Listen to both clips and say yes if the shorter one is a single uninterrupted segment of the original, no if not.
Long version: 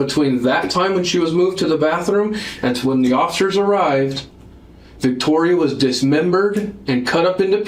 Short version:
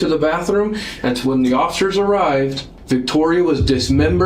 no